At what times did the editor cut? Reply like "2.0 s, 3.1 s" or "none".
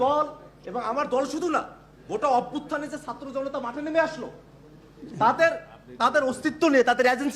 none